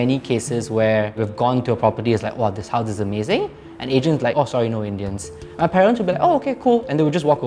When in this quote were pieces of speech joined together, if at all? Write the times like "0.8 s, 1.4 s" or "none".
4.3 s